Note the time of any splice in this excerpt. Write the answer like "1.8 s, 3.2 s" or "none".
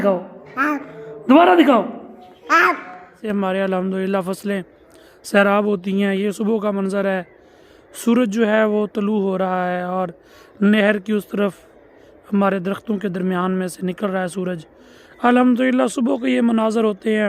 3.2 s

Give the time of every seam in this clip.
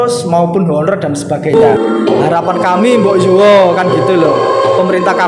1.5 s

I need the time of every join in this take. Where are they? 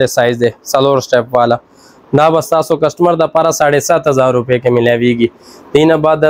none

